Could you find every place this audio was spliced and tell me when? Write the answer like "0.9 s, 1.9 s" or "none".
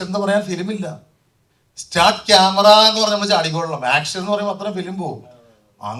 none